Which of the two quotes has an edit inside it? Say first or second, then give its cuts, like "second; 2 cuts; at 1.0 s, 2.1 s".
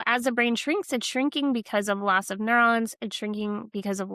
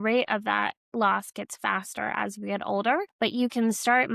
second; 1 cut; at 3.1 s